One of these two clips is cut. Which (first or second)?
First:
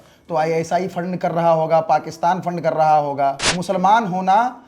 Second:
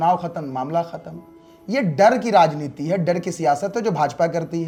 first